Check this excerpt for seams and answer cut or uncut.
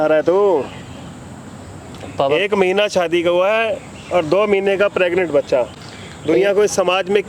uncut